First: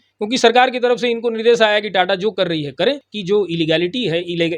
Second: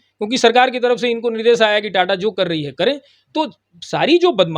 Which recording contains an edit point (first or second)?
first